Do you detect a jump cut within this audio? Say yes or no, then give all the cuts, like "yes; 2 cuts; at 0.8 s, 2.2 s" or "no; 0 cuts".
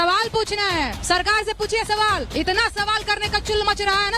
yes; 2 cuts; at 1.0 s, 2.3 s